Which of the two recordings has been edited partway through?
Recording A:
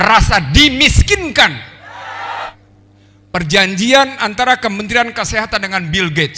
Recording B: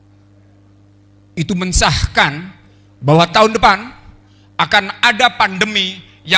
A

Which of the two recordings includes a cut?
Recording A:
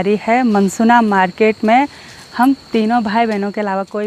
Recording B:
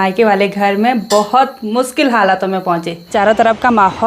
B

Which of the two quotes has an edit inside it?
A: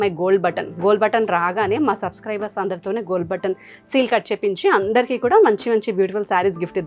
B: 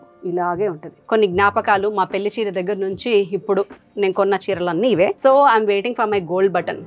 B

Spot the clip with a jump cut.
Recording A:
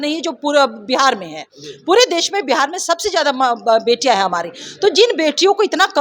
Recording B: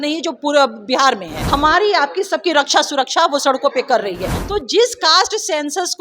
B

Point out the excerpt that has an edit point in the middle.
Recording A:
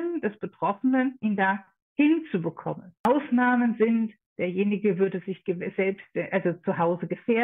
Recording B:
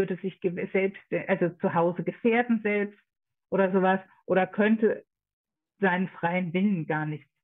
A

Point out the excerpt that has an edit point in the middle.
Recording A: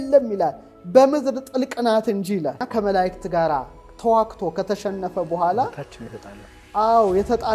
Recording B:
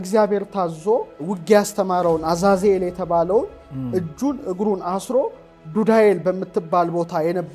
A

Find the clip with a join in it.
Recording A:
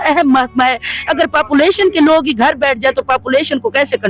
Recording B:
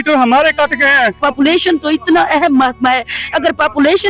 B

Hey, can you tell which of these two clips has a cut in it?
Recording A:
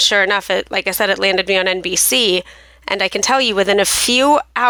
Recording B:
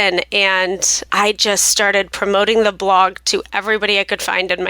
B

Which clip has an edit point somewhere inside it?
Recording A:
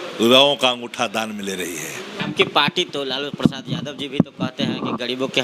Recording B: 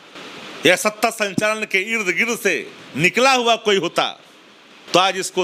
A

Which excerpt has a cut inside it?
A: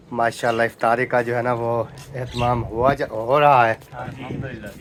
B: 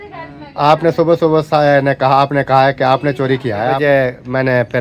B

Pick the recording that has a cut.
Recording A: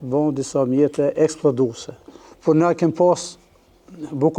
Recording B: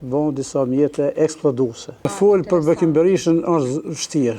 A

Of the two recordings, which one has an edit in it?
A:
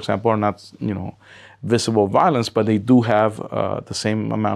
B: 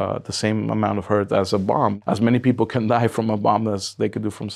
B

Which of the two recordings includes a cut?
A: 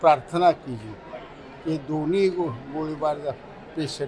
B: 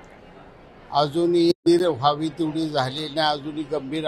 B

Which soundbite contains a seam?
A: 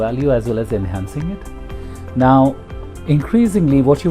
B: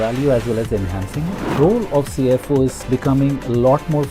B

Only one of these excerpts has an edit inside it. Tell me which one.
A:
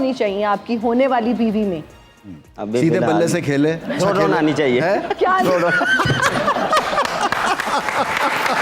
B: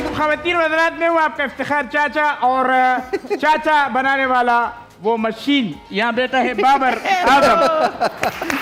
A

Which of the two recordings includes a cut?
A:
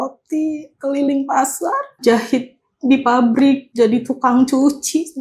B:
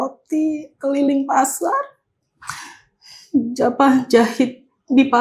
A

